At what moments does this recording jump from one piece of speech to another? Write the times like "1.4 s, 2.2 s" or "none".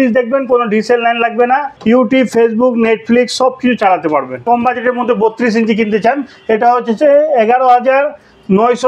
1.7 s, 4.4 s